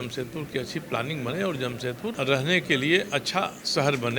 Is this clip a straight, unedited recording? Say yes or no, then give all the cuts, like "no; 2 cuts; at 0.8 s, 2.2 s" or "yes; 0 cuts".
no; 1 cut; at 2.2 s